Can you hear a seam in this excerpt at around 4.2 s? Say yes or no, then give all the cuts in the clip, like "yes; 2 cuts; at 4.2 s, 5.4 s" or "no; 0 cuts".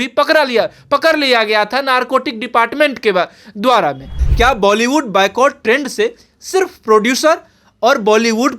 yes; 1 cut; at 4.2 s